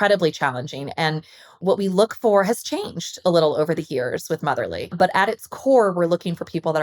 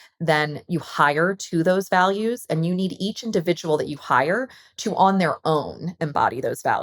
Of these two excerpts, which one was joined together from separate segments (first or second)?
first